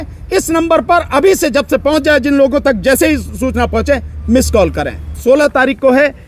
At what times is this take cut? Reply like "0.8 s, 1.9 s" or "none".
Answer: 5.2 s